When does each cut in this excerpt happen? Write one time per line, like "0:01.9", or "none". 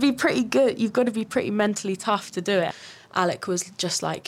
0:02.8

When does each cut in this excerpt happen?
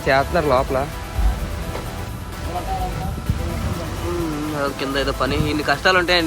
none

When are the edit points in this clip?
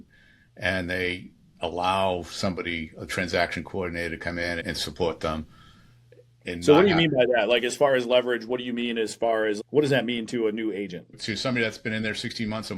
0:04.6
0:11.2

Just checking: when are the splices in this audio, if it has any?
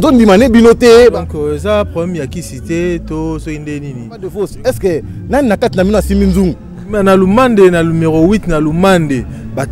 0:01.0

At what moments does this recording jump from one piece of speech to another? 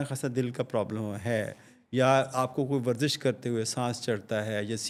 none

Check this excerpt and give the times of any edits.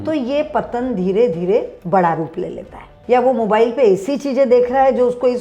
0:02.9

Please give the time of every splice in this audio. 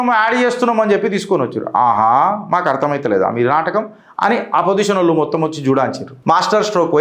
0:06.1

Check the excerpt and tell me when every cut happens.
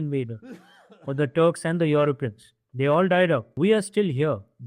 0:03.5

